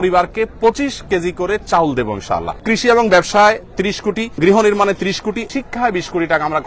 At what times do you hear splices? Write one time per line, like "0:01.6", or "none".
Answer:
0:02.6
0:04.4
0:05.4

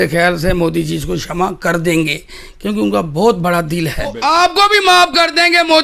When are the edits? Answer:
0:04.2

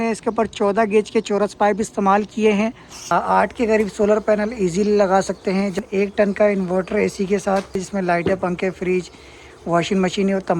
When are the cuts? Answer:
0:03.1
0:05.8
0:07.8

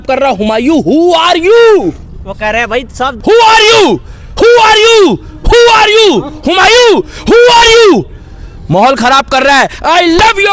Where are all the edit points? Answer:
0:03.2

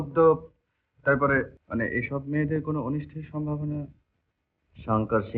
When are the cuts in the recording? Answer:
0:01.6

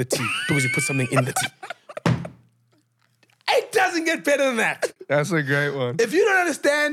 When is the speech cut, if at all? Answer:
0:04.9

